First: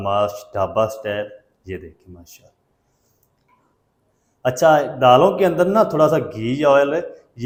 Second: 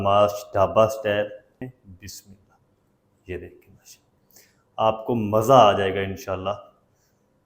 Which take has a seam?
second; 1 cut; at 1.6 s

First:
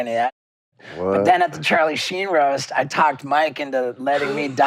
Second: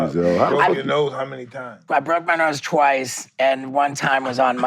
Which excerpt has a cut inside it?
second; 1 cut; at 1.8 s

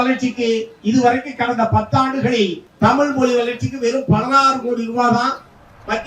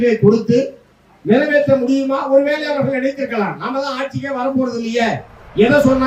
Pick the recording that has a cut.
first; 1 cut; at 2.6 s

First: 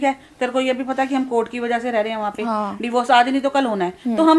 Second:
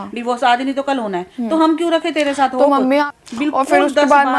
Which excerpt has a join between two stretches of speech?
second; 1 cut; at 3.0 s

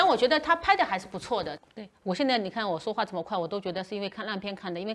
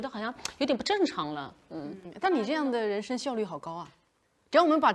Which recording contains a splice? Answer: first; 1 cut; at 1.5 s

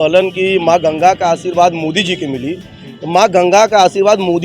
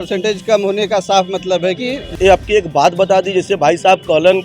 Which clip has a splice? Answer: second; 1 cut; at 2.1 s

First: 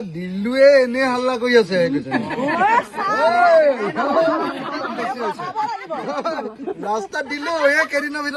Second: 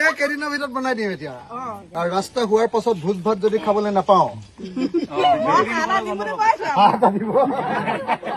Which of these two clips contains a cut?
second; 1 cut; at 1.8 s

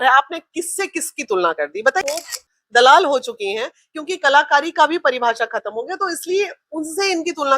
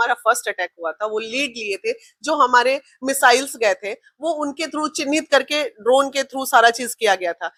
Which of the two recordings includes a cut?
first; 1 cut; at 2.0 s

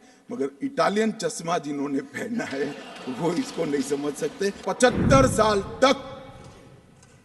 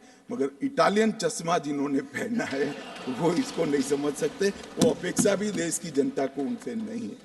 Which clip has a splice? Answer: first; 1 cut; at 4.6 s

